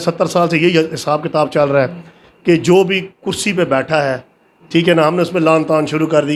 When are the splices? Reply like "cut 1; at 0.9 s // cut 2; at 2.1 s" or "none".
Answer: none